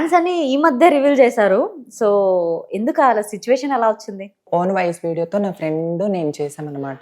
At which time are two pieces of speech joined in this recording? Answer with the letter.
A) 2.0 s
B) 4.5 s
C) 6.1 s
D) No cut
B